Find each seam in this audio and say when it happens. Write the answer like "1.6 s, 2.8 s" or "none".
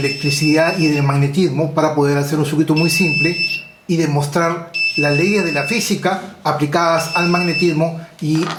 none